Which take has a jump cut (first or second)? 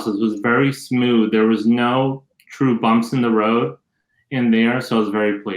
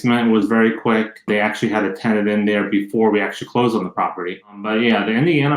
second